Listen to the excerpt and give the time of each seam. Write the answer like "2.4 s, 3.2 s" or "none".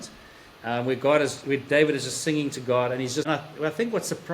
3.3 s